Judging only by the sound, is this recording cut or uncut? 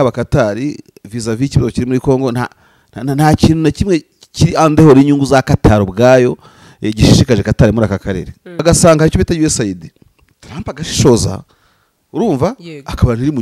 cut